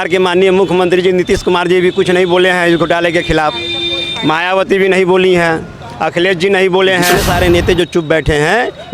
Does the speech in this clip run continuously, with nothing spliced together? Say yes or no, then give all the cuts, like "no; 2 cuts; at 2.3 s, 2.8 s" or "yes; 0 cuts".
no; 1 cut; at 7.2 s